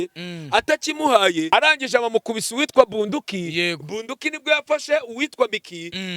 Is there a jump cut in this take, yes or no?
yes